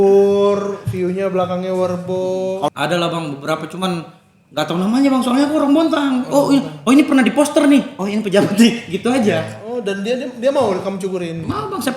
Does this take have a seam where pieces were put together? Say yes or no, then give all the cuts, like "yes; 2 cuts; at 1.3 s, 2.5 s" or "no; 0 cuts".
yes; 1 cut; at 2.7 s